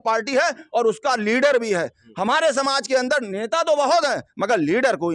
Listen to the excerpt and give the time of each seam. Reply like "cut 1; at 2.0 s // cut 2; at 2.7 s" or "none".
none